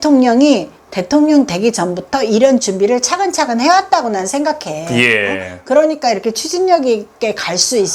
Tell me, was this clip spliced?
no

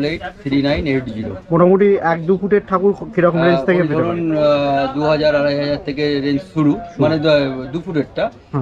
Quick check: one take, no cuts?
yes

